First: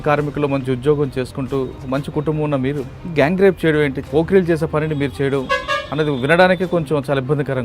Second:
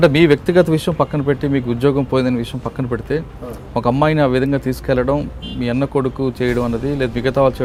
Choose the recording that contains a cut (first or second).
first